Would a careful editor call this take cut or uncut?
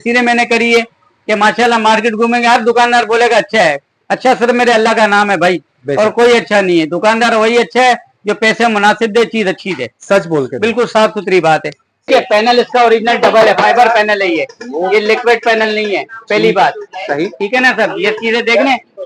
cut